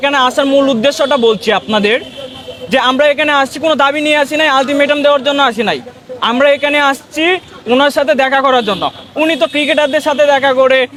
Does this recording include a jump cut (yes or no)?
no